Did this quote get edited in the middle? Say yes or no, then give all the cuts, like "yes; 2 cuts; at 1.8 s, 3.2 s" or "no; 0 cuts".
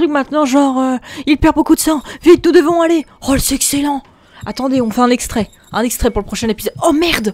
no; 0 cuts